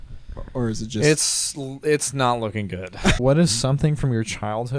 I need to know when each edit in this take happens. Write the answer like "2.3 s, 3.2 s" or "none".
3.2 s